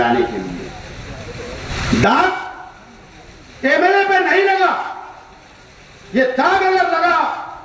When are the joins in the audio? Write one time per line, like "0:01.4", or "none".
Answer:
0:01.7